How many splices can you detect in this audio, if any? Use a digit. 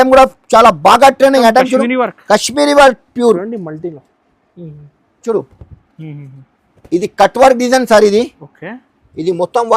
1